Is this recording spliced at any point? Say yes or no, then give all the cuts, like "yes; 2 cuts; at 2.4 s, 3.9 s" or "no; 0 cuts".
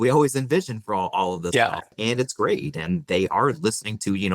yes; 1 cut; at 2.0 s